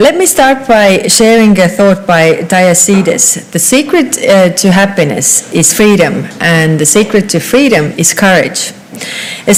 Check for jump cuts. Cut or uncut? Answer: uncut